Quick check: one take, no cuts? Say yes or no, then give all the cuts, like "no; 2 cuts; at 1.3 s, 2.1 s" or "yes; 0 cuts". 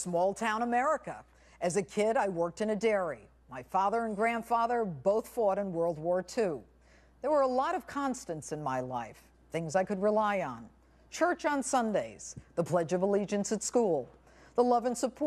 yes; 0 cuts